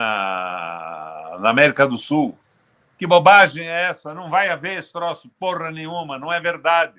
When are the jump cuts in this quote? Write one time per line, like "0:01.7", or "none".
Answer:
none